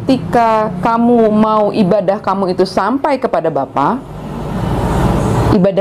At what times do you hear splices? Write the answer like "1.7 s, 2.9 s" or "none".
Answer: none